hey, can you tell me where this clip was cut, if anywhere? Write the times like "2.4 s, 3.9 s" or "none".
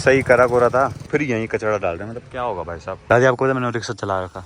1.0 s, 2.9 s